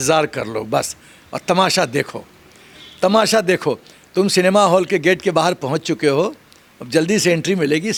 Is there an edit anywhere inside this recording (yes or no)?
no